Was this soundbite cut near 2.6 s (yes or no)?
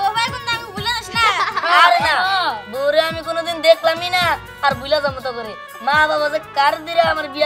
no